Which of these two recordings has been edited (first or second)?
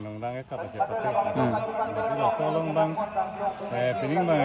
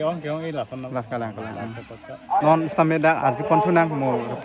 second